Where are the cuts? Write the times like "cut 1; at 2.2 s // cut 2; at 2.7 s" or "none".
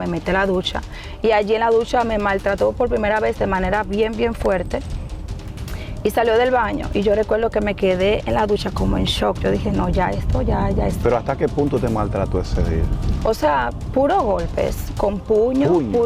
none